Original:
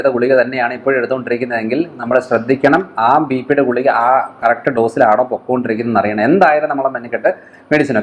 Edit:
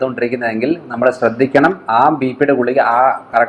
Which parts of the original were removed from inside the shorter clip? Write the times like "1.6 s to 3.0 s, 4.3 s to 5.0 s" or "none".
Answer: none